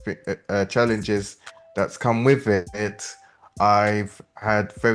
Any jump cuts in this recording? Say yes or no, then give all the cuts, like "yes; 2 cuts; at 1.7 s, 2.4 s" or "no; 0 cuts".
no; 0 cuts